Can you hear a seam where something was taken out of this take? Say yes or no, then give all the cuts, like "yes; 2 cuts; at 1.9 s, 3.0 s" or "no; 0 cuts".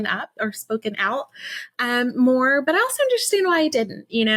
no; 0 cuts